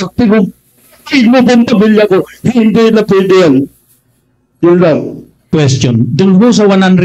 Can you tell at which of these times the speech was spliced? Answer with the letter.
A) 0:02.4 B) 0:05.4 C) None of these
B